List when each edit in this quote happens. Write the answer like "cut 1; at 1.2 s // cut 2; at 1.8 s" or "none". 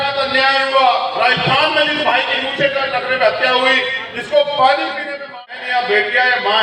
cut 1; at 5.5 s